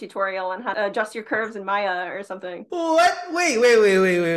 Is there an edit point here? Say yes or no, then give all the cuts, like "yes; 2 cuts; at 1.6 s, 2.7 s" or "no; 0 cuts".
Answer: yes; 2 cuts; at 0.7 s, 2.6 s